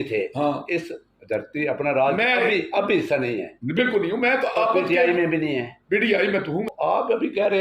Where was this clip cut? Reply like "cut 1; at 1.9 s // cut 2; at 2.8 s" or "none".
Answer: cut 1; at 6.7 s